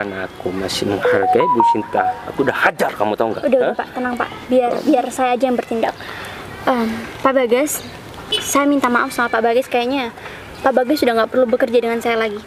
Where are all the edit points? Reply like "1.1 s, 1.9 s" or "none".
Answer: none